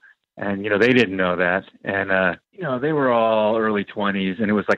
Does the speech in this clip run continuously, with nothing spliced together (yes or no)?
no